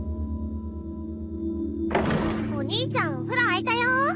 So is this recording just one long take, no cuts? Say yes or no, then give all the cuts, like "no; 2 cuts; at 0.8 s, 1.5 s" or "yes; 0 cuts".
no; 1 cut; at 1.5 s